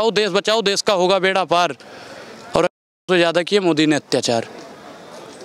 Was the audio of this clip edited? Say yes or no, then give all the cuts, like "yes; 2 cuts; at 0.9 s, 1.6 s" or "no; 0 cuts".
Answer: no; 0 cuts